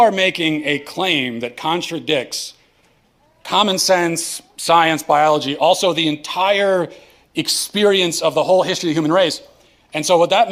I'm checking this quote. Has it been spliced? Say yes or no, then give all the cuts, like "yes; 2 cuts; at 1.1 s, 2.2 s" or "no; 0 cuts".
no; 0 cuts